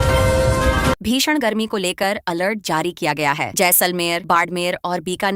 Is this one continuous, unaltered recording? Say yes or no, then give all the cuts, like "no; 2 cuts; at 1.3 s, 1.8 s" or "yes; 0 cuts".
no; 1 cut; at 1.0 s